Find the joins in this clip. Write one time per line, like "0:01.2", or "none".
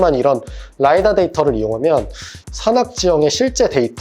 0:02.4